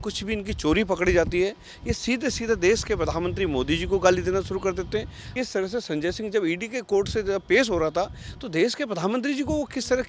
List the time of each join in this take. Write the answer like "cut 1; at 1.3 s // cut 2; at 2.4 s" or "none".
cut 1; at 5.2 s